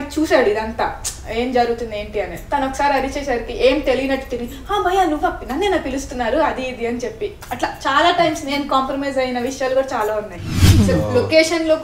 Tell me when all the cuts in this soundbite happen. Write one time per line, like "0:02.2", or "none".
0:10.5